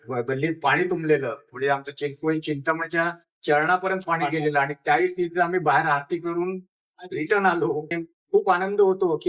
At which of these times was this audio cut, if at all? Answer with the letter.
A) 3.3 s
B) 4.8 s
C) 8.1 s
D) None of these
C